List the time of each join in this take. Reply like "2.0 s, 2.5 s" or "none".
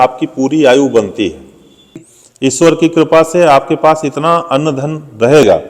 1.7 s